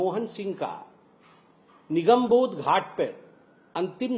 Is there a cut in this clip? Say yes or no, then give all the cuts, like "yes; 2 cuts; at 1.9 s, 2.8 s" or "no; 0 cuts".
no; 0 cuts